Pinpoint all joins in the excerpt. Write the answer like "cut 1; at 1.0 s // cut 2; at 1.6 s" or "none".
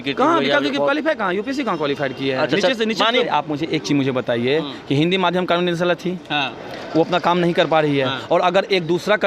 cut 1; at 3.3 s